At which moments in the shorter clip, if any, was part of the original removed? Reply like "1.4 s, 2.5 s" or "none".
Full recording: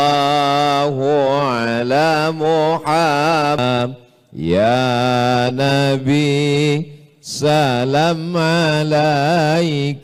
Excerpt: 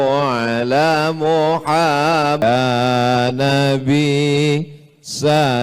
2.4 s